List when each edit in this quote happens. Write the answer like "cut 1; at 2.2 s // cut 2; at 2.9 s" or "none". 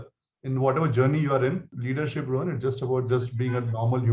cut 1; at 1.7 s